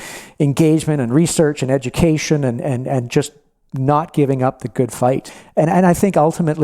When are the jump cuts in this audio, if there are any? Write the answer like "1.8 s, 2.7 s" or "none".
5.3 s